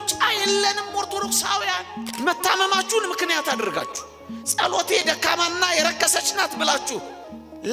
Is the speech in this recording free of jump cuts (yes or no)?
no